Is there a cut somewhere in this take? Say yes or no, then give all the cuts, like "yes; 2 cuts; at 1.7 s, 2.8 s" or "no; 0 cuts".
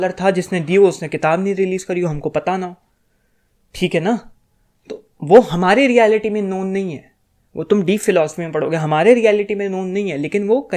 no; 0 cuts